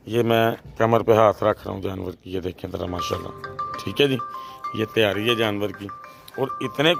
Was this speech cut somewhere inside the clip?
no; 0 cuts

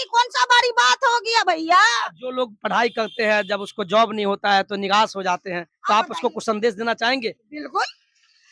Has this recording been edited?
no; 0 cuts

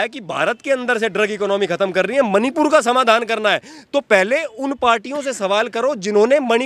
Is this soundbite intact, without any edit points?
yes; 0 cuts

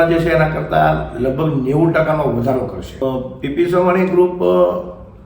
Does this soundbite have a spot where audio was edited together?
yes; 1 cut; at 3.0 s

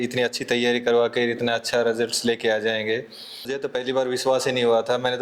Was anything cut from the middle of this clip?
yes; 1 cut; at 3.5 s

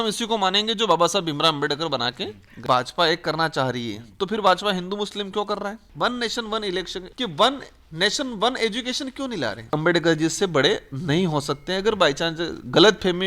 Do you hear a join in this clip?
yes; 4 cuts; at 2.6 s, 5.8 s, 7.0 s, 9.7 s

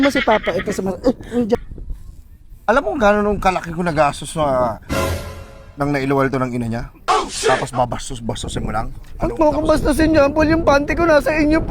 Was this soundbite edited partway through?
yes; 1 cut; at 1.6 s

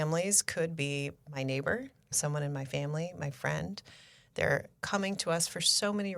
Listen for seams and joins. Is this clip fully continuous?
no; 2 cuts; at 2.1 s, 4.8 s

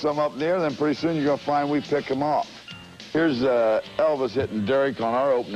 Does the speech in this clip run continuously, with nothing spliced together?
yes; 0 cuts

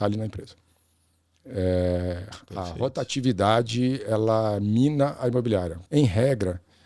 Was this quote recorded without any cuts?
no; 1 cut; at 5.8 s

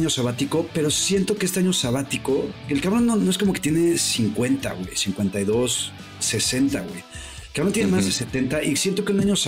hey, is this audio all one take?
yes; 0 cuts

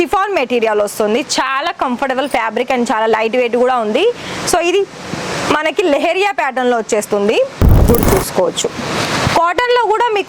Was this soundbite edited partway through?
yes; 1 cut; at 7.9 s

